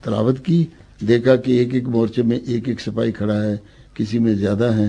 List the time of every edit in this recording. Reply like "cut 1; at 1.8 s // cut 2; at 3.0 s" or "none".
none